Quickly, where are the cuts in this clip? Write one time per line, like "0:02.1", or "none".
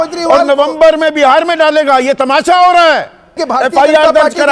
0:03.4